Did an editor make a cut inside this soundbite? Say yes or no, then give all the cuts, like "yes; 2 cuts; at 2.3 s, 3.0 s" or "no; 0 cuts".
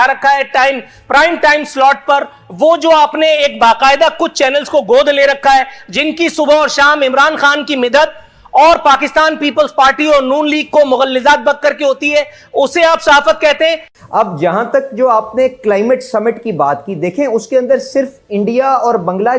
yes; 1 cut; at 13.9 s